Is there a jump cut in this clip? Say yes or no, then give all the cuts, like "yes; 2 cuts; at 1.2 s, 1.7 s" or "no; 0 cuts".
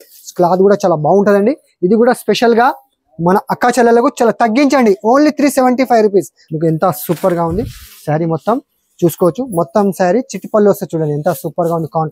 yes; 1 cut; at 6.4 s